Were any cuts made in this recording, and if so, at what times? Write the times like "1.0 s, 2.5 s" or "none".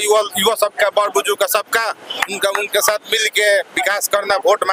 none